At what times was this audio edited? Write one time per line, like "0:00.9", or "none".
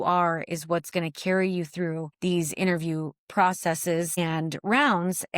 0:02.1
0:04.2